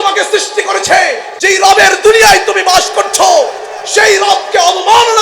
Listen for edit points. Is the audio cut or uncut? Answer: cut